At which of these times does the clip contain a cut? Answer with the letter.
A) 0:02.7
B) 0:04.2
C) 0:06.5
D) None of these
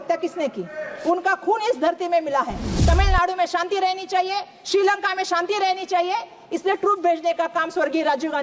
A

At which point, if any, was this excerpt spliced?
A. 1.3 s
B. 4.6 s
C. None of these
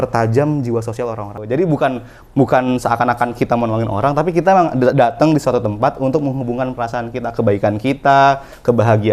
A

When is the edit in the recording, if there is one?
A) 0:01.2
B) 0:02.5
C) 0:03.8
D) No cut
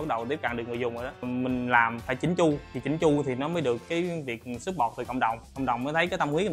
A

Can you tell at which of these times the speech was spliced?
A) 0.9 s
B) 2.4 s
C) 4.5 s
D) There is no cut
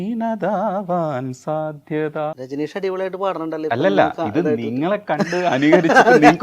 B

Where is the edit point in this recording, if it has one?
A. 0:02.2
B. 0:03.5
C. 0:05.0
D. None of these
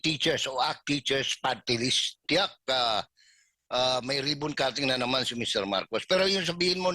A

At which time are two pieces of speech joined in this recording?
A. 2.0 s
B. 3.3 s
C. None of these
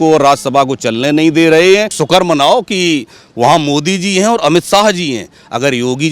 A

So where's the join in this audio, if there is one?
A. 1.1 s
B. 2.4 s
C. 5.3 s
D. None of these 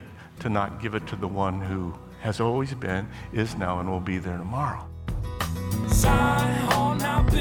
C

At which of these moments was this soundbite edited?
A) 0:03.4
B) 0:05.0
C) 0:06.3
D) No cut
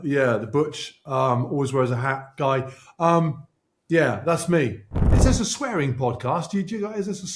B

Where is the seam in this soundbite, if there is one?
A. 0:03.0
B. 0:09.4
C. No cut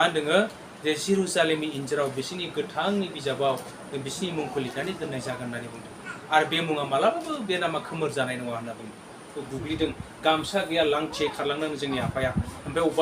B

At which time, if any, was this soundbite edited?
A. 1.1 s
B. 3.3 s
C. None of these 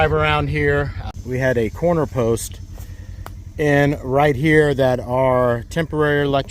A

